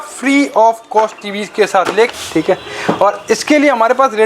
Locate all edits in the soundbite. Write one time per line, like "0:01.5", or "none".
0:02.1